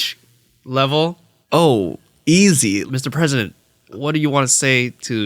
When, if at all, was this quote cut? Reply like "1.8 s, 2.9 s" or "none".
2.8 s, 3.9 s